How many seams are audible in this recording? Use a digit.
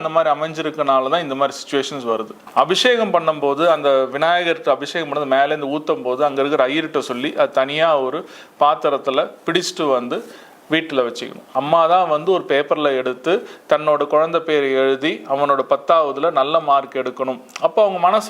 2